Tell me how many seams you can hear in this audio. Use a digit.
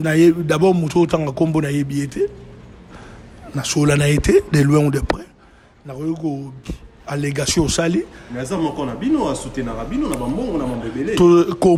0